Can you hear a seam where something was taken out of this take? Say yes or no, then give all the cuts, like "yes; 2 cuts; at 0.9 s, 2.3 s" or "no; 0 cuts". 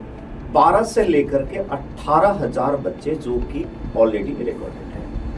no; 0 cuts